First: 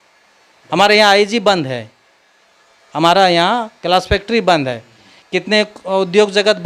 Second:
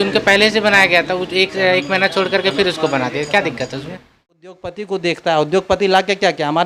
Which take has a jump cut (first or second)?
second